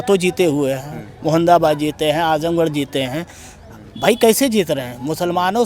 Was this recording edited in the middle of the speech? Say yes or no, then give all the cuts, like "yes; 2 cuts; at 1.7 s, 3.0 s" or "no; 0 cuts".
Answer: no; 0 cuts